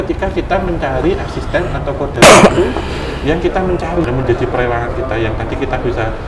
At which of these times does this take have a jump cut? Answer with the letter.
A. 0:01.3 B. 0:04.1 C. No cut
B